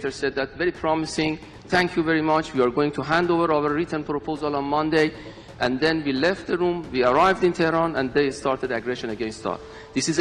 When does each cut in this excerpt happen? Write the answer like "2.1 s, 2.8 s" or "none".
none